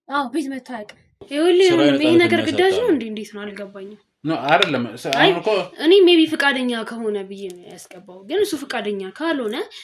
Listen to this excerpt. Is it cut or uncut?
cut